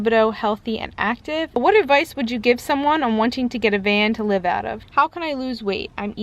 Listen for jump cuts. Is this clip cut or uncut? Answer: cut